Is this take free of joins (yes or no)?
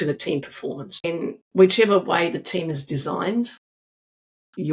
no